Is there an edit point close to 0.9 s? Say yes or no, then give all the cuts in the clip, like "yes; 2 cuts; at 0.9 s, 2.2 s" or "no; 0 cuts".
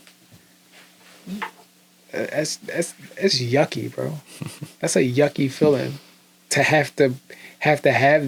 no; 0 cuts